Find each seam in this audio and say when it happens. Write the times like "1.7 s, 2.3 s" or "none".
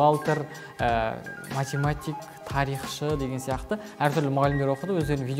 none